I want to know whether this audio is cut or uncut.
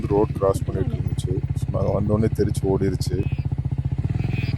uncut